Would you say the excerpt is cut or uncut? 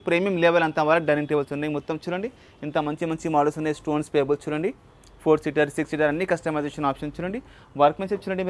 uncut